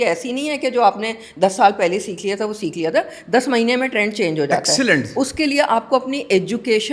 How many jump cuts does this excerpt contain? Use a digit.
0